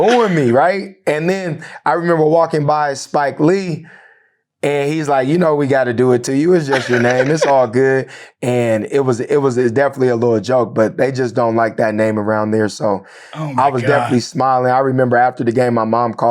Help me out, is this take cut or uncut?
cut